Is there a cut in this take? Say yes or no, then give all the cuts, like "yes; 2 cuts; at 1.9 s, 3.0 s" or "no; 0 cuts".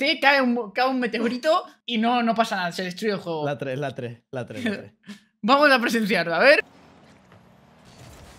yes; 2 cuts; at 1.8 s, 6.6 s